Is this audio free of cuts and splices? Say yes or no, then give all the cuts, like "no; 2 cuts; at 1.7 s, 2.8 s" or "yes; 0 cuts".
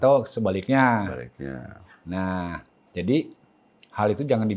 yes; 0 cuts